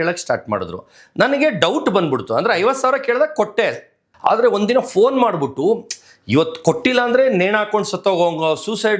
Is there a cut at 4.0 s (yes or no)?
yes